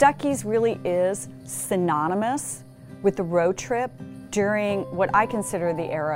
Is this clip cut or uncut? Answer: uncut